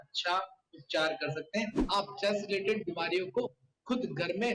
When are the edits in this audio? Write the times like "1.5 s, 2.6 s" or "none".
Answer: 1.8 s